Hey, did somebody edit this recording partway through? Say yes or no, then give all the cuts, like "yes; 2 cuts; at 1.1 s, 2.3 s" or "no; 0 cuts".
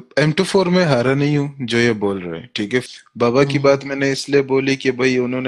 yes; 1 cut; at 2.9 s